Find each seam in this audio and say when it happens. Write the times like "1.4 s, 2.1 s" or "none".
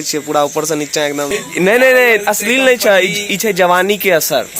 1.3 s